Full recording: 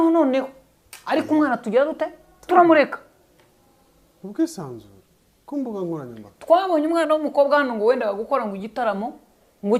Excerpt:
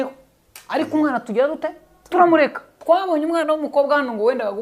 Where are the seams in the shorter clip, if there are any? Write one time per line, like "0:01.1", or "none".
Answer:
0:02.7